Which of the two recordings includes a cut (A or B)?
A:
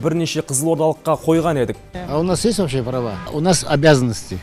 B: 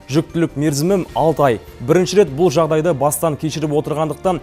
A